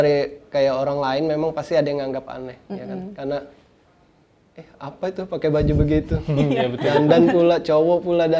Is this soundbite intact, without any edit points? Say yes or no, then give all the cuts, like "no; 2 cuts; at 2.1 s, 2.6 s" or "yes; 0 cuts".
yes; 0 cuts